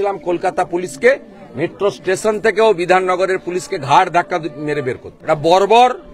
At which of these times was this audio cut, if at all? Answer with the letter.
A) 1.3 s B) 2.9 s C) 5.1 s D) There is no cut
C